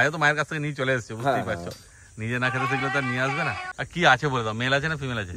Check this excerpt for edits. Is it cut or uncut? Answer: uncut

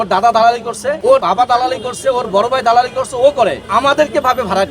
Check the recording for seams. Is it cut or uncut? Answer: cut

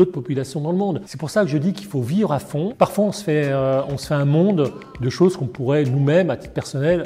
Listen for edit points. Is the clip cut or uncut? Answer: cut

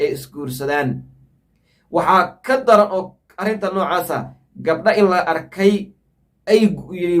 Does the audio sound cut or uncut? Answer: uncut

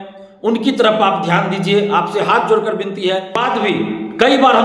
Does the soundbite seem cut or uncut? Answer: cut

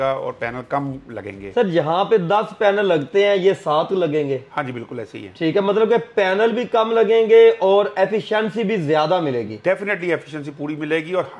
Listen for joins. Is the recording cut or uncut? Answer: uncut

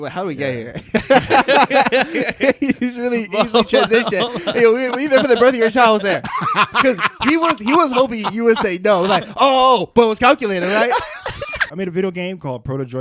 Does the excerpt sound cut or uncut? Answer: cut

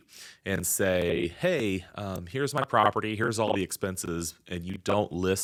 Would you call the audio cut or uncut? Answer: uncut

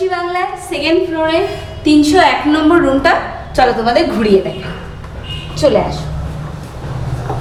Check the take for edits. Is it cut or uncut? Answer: uncut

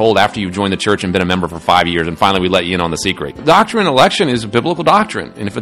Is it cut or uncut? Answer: cut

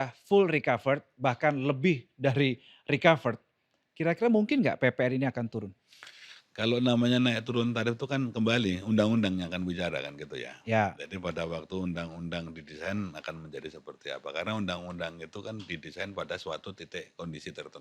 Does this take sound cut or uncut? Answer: uncut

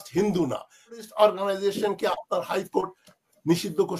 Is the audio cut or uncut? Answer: cut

